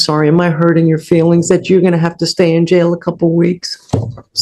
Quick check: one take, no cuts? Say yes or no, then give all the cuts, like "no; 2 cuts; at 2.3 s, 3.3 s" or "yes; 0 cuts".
yes; 0 cuts